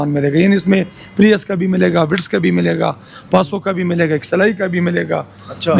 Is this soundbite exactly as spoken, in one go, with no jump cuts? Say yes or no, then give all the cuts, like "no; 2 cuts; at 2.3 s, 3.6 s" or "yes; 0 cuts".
yes; 0 cuts